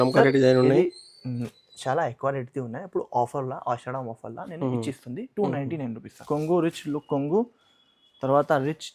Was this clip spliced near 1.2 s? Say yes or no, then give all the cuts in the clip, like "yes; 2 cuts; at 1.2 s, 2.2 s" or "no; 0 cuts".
no; 1 cut; at 6.2 s